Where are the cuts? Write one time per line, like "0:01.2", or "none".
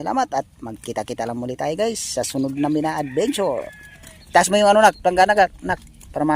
none